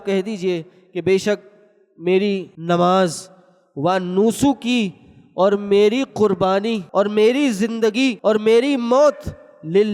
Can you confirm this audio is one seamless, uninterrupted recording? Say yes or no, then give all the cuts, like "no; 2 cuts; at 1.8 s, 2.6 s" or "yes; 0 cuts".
no; 3 cuts; at 2.5 s, 6.8 s, 8.2 s